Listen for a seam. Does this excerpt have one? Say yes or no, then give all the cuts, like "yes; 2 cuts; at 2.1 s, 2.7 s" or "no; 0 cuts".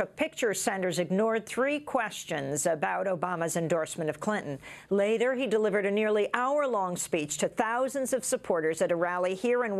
no; 0 cuts